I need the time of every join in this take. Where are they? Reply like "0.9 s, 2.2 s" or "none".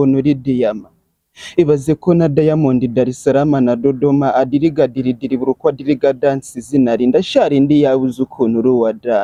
none

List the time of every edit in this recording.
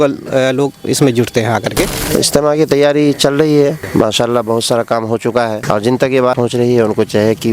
2.0 s, 3.8 s, 5.6 s, 6.4 s

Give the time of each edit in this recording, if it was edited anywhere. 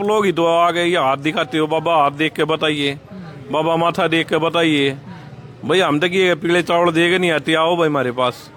none

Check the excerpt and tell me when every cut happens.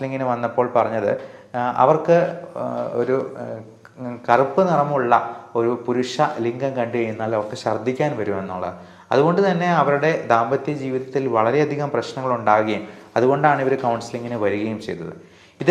none

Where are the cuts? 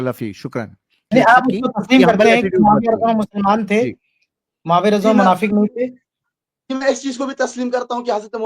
1.1 s

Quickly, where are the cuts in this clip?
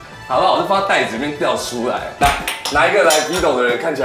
2.1 s

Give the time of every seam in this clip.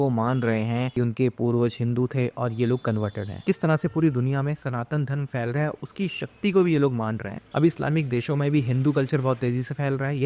none

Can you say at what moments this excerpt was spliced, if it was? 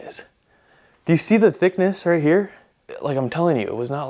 2.9 s

